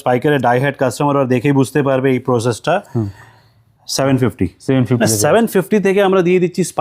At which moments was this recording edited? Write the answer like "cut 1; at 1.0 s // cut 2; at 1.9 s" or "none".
none